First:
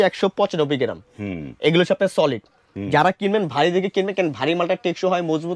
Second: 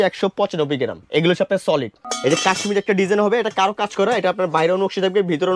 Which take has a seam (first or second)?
second